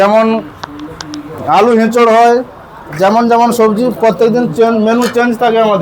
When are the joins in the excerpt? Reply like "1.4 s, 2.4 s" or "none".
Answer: none

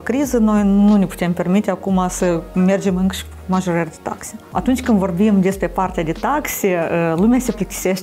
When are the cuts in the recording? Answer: 4.5 s

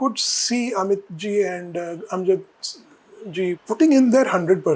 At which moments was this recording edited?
3.6 s

